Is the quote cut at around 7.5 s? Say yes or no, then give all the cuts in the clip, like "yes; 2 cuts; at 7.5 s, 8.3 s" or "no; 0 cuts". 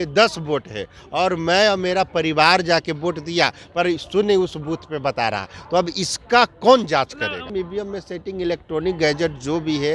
yes; 1 cut; at 7.5 s